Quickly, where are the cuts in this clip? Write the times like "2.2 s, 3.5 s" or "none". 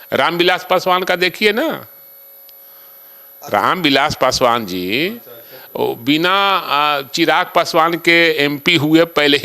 none